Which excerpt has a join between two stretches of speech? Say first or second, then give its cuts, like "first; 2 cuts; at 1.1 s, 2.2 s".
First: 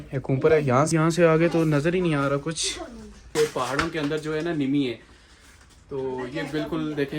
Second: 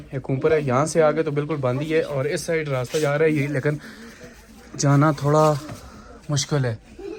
first; 2 cuts; at 0.9 s, 3.3 s